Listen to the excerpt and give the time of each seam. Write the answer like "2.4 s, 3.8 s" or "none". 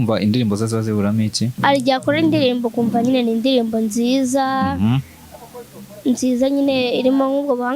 1.6 s